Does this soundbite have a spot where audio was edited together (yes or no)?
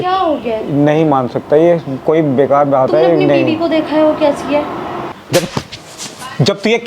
yes